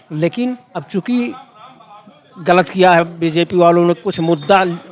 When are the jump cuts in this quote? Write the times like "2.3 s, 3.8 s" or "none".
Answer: none